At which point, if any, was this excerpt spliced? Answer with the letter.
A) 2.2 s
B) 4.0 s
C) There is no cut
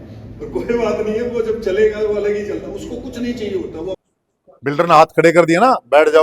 B